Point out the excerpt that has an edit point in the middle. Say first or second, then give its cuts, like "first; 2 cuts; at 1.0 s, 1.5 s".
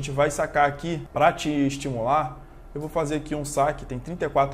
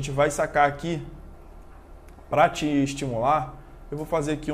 first; 1 cut; at 1.0 s